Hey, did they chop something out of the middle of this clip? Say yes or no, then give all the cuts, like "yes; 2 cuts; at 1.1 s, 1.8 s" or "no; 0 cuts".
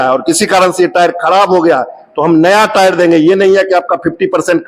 no; 0 cuts